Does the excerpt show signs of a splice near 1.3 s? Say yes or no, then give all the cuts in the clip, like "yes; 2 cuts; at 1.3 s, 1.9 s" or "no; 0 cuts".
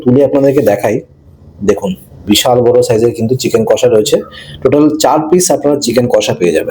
no; 0 cuts